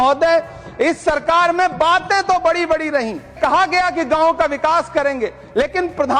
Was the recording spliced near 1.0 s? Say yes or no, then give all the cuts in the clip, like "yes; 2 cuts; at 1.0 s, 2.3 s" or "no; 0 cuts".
no; 1 cut; at 3.4 s